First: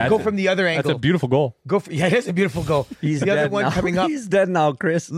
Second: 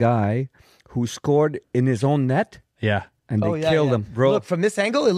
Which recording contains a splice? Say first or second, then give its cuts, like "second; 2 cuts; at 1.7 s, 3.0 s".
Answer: second; 1 cut; at 4.1 s